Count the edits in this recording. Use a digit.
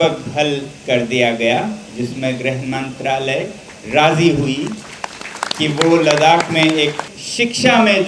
1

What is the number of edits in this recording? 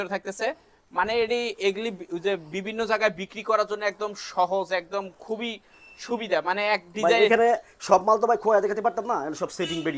0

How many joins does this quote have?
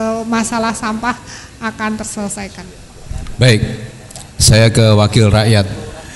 0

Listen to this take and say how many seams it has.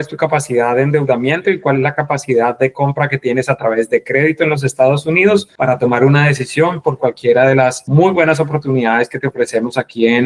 0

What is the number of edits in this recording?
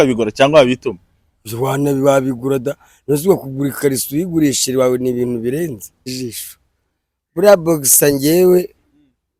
1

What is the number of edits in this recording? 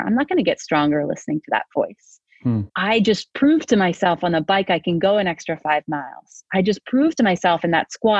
1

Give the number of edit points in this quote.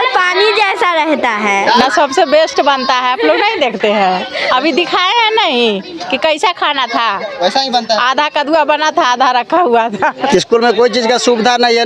2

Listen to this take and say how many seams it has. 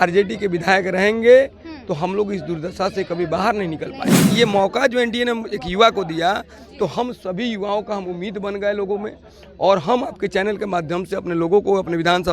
1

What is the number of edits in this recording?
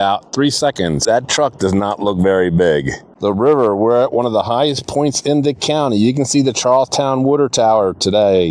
2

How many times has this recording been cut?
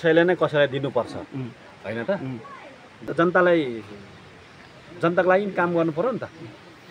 1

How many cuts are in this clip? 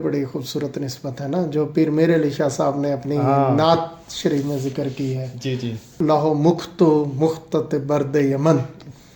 0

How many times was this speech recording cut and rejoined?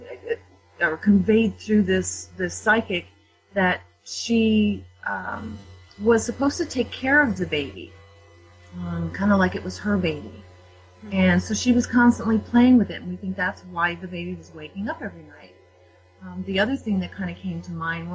1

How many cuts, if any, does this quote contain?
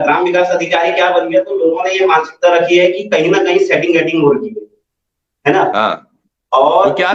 0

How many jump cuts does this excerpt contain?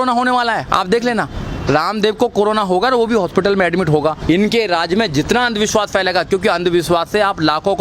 1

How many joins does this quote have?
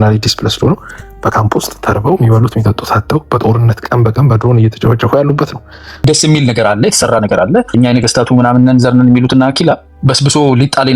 3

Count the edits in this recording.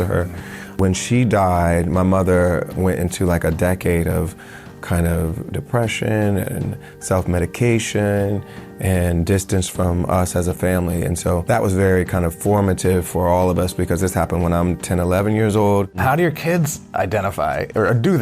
1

